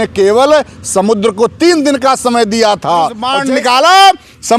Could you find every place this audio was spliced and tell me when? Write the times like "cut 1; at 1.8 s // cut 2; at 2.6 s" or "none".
cut 1; at 3.3 s